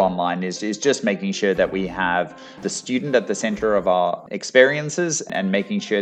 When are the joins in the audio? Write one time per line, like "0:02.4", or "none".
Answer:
0:02.6
0:04.2
0:05.2